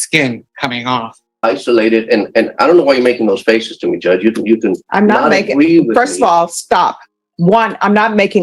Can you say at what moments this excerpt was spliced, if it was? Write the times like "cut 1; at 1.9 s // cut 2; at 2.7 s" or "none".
cut 1; at 1.3 s